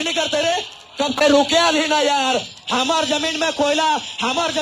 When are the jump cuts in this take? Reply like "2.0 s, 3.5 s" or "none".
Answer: 1.2 s